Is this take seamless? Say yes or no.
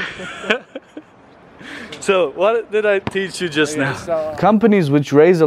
no